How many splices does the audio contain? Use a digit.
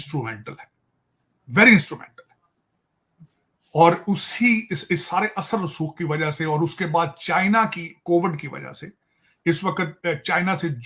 0